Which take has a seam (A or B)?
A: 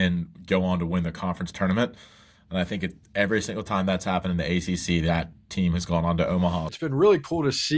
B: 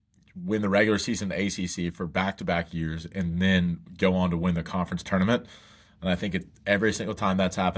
A